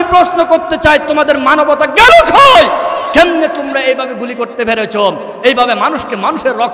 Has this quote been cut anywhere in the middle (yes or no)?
no